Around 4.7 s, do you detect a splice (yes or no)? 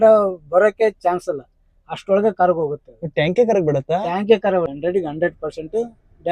yes